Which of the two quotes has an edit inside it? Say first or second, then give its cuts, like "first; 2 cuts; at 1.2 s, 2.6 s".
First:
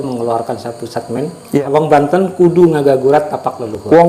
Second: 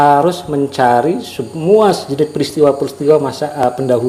first; 1 cut; at 1.6 s